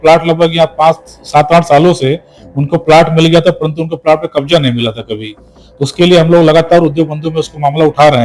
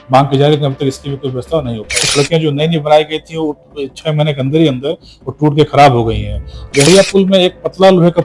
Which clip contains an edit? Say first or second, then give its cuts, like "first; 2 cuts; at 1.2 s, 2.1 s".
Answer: second; 2 cuts; at 2.0 s, 6.9 s